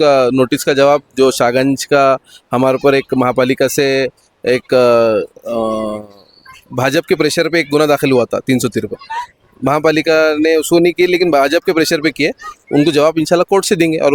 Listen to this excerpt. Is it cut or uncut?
uncut